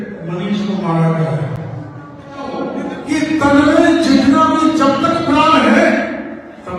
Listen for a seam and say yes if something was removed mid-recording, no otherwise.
yes